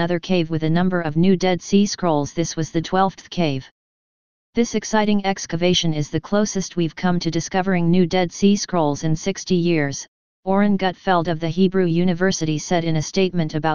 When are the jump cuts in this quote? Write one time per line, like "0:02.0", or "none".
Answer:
0:05.9